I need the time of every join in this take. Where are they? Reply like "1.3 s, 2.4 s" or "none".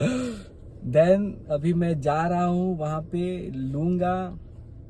none